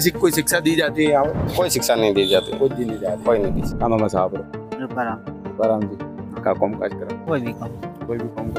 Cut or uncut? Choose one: uncut